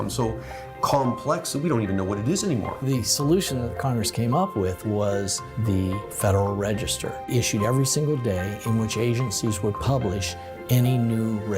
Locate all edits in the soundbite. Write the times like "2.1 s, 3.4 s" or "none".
2.8 s, 7.2 s